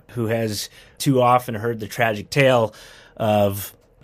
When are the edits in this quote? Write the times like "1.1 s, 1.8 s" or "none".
1.0 s